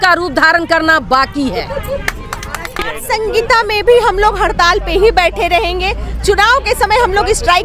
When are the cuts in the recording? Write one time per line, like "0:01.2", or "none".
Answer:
0:02.9